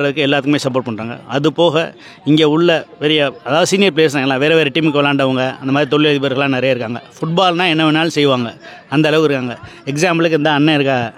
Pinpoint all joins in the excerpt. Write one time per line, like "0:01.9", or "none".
none

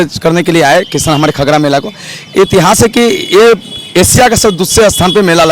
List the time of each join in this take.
none

